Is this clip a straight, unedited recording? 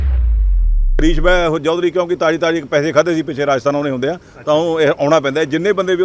no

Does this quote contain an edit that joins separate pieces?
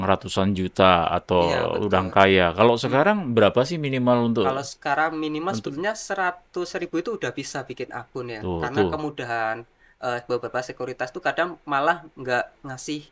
no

